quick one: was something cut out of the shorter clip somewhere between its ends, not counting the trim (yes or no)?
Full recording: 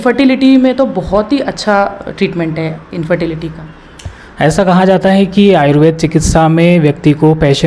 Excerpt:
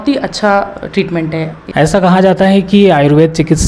yes